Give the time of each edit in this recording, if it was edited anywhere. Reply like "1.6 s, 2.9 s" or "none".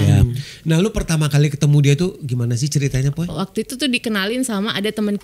3.3 s